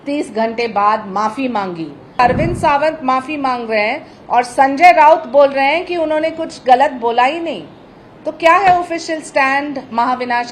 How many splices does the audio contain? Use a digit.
1